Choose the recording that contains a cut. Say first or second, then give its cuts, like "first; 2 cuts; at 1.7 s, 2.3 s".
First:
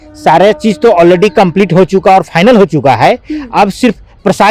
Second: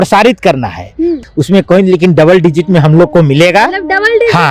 second; 1 cut; at 1.2 s